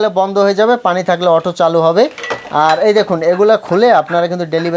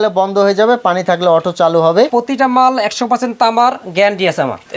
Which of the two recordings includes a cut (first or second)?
second